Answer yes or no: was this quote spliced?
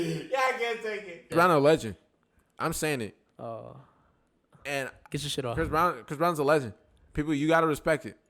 yes